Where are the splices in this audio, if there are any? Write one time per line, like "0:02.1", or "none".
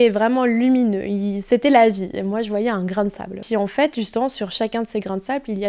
0:03.4